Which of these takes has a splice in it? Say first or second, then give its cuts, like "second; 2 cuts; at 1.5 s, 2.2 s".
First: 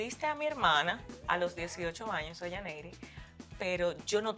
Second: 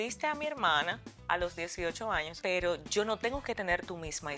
second; 1 cut; at 2.3 s